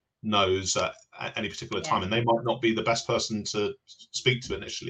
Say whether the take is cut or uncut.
uncut